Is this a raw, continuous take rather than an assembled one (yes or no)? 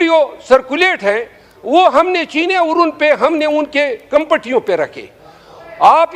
yes